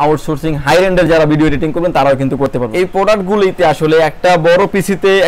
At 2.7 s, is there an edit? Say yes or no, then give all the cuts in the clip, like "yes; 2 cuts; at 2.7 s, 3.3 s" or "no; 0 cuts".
yes; 1 cut; at 2.7 s